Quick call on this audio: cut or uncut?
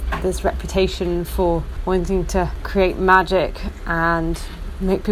cut